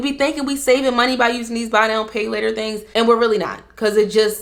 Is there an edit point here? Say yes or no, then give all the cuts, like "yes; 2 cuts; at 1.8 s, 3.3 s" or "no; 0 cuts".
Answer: no; 0 cuts